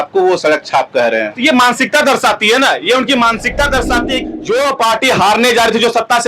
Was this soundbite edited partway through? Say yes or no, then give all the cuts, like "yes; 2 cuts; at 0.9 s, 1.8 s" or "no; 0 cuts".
yes; 1 cut; at 4.2 s